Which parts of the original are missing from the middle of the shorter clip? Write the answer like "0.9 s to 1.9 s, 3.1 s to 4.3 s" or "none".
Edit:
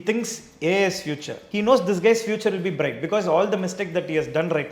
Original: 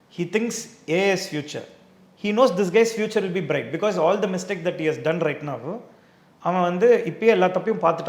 1.6 s to 2.0 s